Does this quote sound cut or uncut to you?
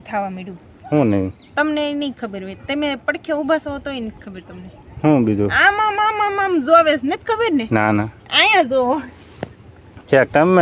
uncut